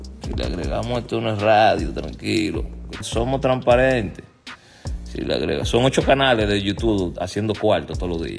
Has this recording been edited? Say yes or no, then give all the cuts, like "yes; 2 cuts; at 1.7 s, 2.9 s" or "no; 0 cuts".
yes; 1 cut; at 3.1 s